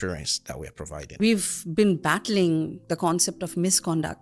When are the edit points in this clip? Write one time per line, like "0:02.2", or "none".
0:01.2